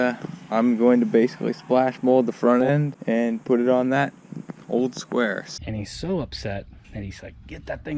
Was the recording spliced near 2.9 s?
yes; 2 cuts; at 2.9 s, 5.5 s

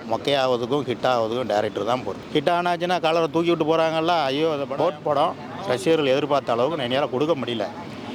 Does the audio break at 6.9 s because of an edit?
no; 2 cuts; at 2.2 s, 4.7 s

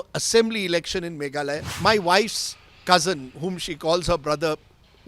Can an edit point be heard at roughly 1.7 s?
yes; 1 cut; at 1.7 s

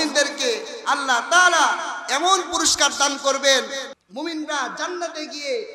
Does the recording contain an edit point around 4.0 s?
yes; 1 cut; at 4.0 s

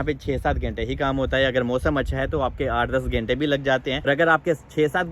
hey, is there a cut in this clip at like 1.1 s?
no; 1 cut; at 3.9 s

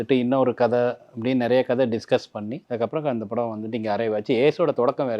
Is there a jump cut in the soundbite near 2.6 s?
yes; 1 cut; at 2.6 s

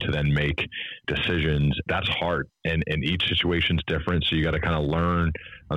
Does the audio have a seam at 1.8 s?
yes; 2 cuts; at 1.0 s, 1.8 s

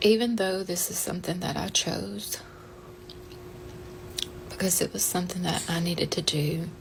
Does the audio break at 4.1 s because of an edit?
no; 0 cuts

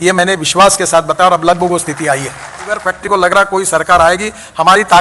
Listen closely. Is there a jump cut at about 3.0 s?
yes; 1 cut; at 3.0 s

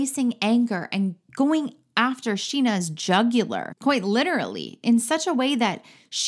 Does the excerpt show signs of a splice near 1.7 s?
no; 1 cut; at 3.6 s

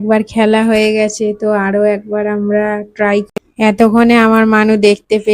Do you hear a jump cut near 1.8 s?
no; 1 cut; at 3.3 s

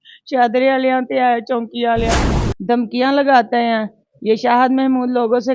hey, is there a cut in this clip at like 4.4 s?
no; 1 cut; at 2.3 s

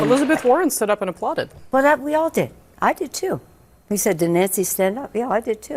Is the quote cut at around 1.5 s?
yes; 1 cut; at 1.5 s

